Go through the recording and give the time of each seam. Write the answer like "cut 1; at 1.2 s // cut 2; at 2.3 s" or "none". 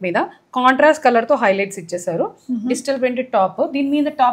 none